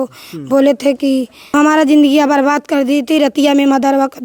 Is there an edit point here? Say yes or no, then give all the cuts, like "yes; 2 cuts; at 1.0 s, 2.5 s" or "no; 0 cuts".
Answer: no; 0 cuts